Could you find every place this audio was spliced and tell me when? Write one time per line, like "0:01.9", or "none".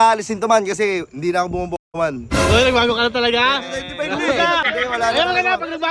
0:04.7